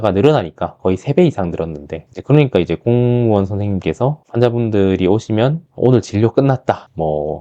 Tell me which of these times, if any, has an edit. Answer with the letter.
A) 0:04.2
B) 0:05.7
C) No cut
C